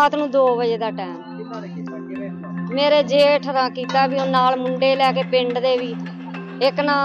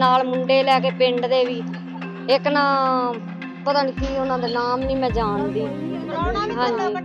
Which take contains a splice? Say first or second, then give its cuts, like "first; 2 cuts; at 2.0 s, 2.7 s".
first; 2 cuts; at 0.9 s, 2.7 s